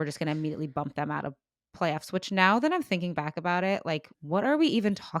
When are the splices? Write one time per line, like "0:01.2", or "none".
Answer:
0:04.1